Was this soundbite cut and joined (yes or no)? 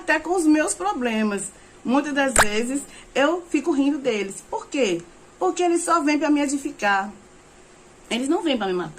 no